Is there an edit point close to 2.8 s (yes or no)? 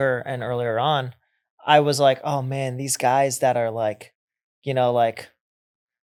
no